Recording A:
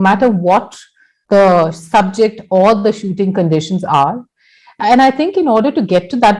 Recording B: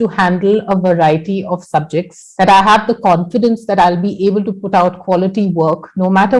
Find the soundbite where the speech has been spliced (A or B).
B